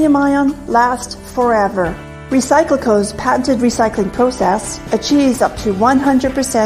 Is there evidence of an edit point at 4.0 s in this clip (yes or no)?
no